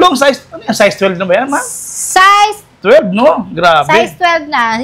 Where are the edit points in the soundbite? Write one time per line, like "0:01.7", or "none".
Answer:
none